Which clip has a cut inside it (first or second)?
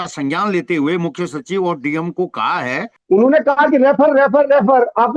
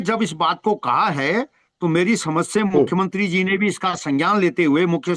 first